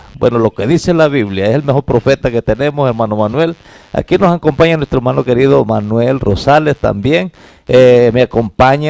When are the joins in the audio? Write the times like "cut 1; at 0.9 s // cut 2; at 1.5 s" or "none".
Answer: cut 1; at 4.3 s